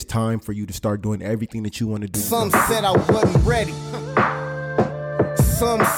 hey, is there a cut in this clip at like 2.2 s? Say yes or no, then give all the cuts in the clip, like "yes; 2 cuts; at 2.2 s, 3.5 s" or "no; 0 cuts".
yes; 1 cut; at 2.2 s